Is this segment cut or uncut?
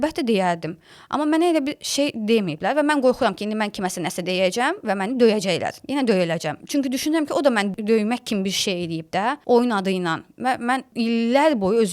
cut